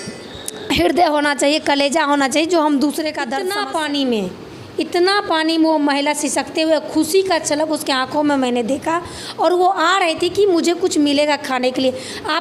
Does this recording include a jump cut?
yes; 1 cut; at 3.4 s

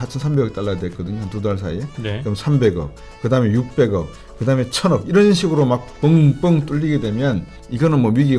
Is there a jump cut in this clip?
no; 0 cuts

